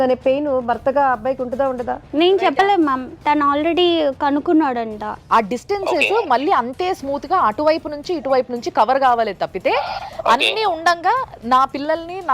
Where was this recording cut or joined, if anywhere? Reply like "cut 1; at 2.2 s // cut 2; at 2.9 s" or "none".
cut 1; at 2.0 s // cut 2; at 5.2 s